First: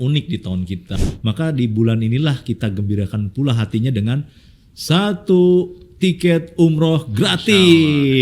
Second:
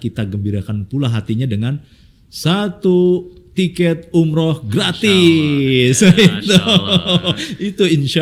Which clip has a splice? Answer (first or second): first